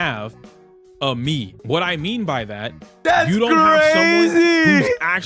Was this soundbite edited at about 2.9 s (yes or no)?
no